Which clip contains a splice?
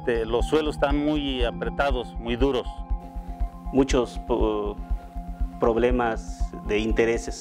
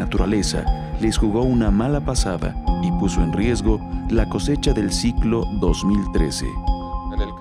second; 1 cut; at 6.1 s

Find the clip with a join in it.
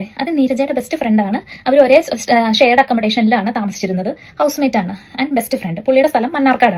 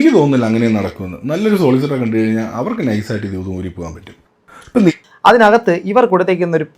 second; 1 cut; at 5.1 s

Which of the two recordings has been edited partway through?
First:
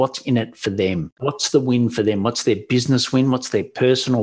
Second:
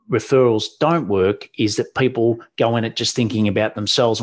first; 1 cut; at 1.1 s

